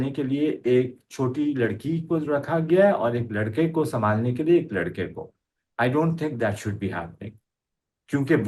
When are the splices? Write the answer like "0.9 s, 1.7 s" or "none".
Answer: none

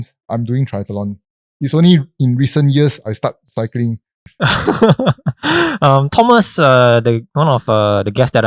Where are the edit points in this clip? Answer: 4.3 s

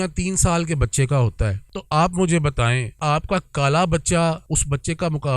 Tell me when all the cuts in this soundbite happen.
1.7 s, 2.9 s, 4.4 s

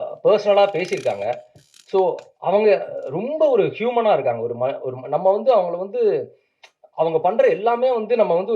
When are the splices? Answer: none

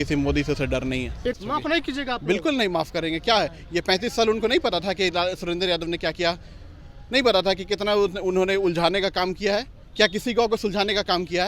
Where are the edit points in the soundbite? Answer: 1.4 s

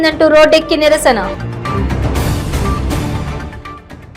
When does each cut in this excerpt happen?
none

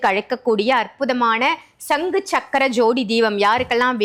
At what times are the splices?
none

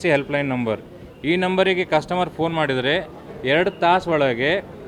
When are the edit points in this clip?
none

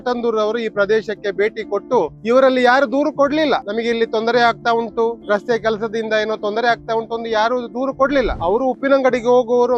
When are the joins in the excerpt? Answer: 2.2 s, 3.7 s, 5.2 s, 8.3 s

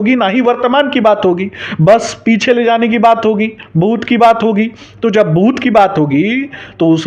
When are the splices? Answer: none

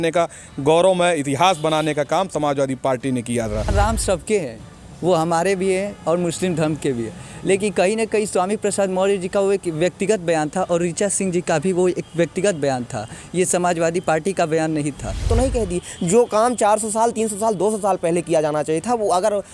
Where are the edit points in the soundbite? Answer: 3.7 s, 15.3 s

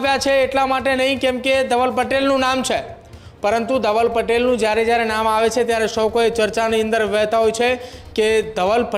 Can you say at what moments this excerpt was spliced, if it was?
none

